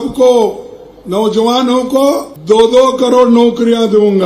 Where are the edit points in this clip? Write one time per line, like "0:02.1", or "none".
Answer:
0:02.3

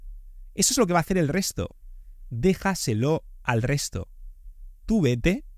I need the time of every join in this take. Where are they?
none

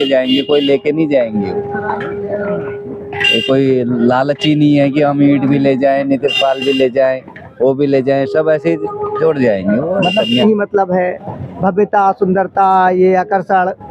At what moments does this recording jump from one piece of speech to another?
0:10.4

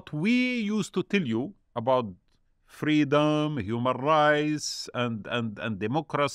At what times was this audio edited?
none

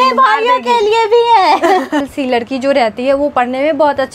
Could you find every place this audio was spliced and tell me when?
0:02.1

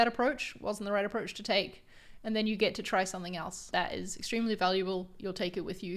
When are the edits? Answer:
0:03.6

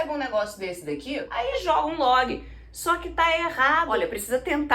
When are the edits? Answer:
0:01.3
0:03.9

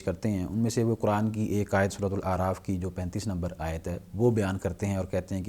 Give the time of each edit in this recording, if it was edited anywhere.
none

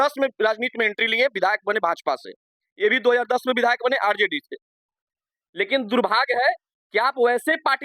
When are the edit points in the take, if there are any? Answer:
none

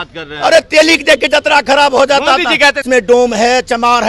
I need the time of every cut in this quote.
0:02.8

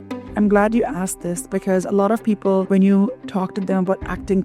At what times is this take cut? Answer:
0:02.7

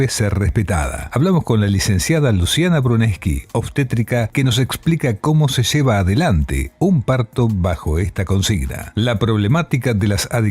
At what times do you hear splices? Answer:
0:08.7

